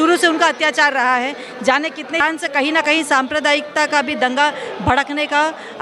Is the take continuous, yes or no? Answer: no